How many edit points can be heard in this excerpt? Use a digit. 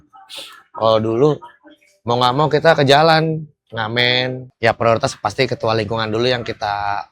1